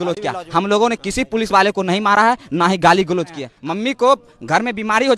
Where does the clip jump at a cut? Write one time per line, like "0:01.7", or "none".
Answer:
0:03.5